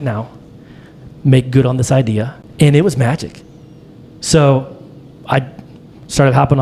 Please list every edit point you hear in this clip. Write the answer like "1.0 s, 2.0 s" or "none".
2.4 s